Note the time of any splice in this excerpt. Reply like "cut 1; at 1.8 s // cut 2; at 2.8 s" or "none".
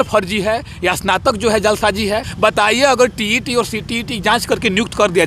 cut 1; at 2.3 s